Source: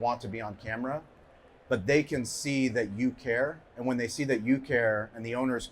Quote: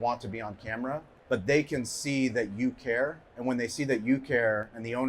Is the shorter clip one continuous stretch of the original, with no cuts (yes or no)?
no